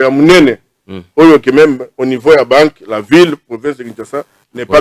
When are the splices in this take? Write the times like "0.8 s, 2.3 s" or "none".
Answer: none